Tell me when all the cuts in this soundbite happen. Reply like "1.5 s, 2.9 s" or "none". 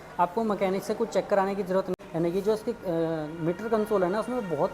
1.9 s